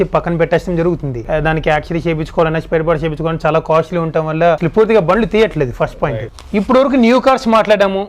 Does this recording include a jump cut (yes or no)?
yes